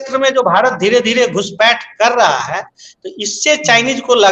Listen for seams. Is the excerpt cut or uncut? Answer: uncut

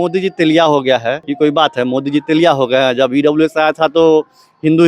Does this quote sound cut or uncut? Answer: cut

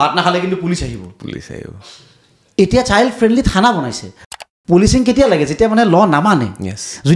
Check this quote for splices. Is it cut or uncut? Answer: cut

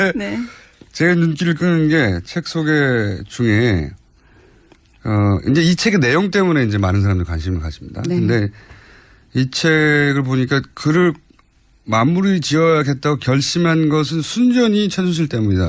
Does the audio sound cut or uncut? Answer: cut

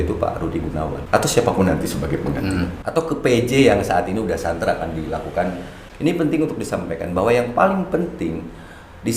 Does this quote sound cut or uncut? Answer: cut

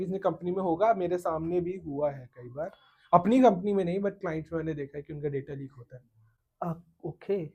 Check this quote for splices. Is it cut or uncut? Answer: uncut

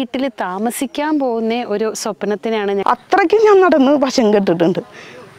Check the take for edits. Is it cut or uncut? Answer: cut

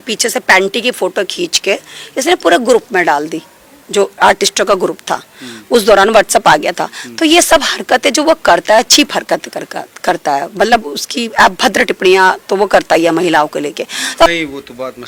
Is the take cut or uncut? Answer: uncut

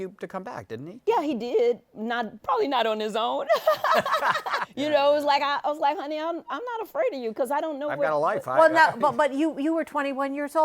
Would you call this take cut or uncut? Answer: cut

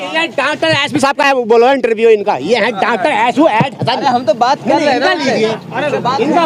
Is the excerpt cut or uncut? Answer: uncut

